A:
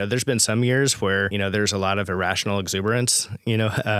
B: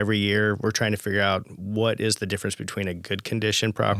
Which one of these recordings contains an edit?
A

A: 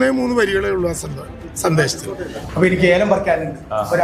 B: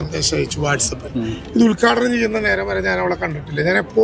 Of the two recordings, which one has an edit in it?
A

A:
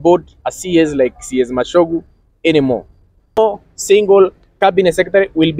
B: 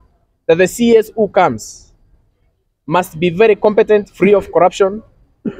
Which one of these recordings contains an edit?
A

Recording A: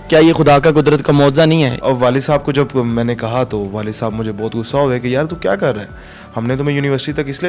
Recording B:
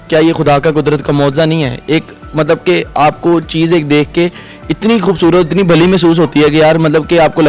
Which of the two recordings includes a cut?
A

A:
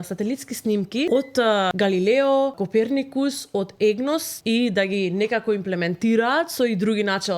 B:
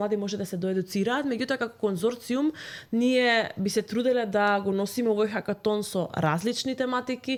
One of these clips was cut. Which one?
A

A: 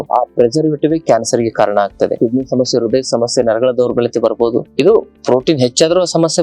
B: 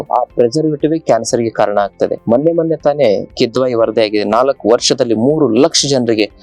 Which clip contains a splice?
A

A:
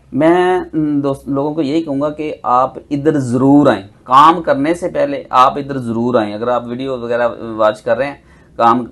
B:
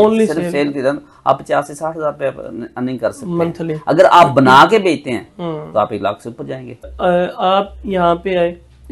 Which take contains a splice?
B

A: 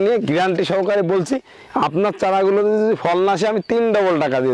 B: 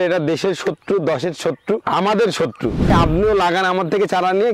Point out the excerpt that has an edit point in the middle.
B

